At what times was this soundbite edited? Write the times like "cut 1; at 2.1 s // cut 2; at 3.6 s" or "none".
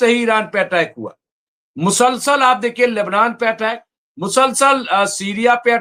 none